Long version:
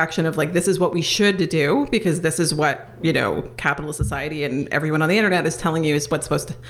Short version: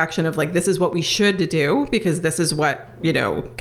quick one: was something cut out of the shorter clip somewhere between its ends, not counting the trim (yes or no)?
no